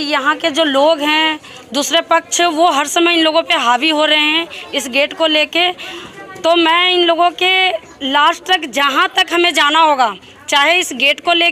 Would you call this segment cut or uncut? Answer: uncut